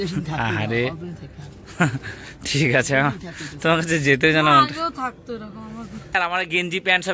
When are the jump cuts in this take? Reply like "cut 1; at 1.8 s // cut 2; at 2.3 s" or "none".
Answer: cut 1; at 6.1 s